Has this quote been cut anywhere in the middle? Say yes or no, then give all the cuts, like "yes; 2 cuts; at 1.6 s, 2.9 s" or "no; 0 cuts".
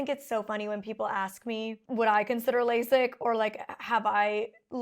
no; 0 cuts